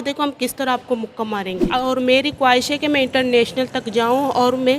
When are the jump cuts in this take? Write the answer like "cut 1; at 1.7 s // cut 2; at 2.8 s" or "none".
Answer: cut 1; at 1.7 s